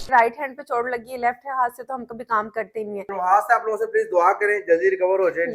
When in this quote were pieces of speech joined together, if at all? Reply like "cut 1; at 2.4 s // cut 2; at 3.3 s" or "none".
cut 1; at 3.0 s